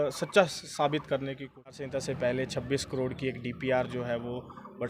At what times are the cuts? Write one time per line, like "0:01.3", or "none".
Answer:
0:01.8

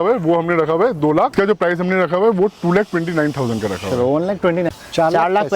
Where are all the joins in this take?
0:01.3
0:04.7

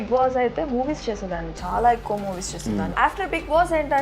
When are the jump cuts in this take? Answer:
0:03.0

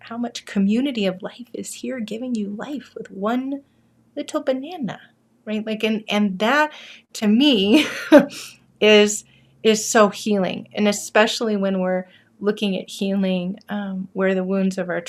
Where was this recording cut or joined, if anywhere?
none

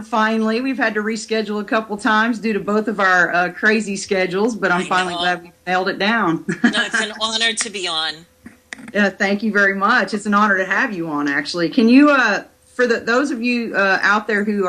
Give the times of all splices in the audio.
0:05.5

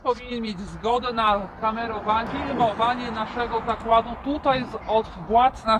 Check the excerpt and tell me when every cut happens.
0:02.2

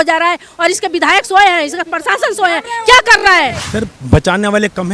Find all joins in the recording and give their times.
0:03.6

